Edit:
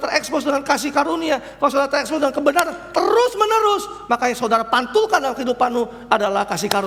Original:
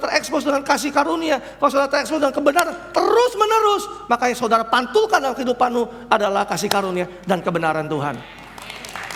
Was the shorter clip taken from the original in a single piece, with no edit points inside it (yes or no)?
yes